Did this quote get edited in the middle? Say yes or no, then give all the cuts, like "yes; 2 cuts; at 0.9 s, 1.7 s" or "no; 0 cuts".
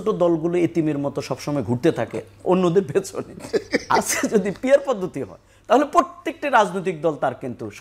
no; 0 cuts